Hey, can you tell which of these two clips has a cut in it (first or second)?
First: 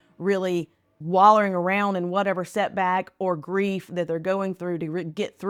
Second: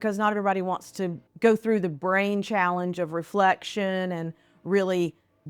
second